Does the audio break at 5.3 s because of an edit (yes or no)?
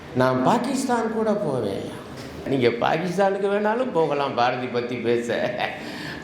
no